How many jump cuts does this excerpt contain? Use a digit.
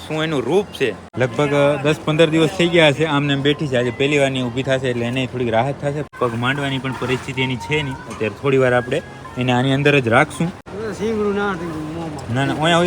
3